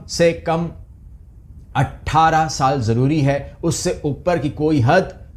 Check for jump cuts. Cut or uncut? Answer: uncut